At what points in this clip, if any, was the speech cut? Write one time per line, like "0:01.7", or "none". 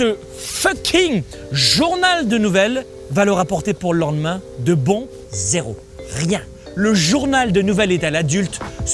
0:03.0
0:05.1
0:06.6